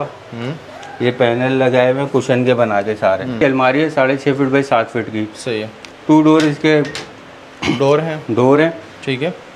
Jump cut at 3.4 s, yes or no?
yes